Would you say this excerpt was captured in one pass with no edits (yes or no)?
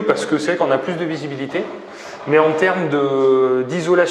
yes